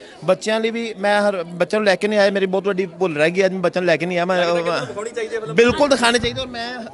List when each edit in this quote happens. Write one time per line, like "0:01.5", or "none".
none